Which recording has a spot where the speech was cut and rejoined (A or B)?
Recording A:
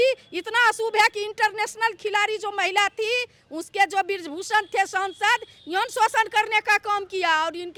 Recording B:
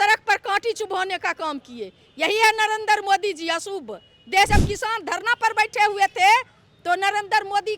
B